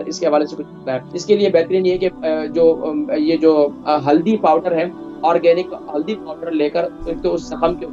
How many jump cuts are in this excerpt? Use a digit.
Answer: 1